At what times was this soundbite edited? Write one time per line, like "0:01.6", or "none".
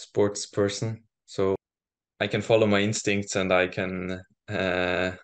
0:01.6

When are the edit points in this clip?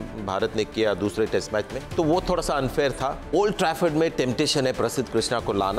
0:01.9
0:03.2

